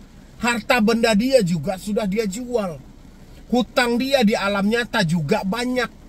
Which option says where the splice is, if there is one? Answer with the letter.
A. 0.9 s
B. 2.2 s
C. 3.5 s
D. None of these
D